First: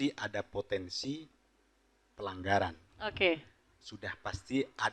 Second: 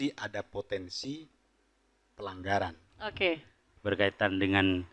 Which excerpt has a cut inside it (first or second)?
second